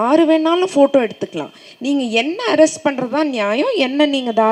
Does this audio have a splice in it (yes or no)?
no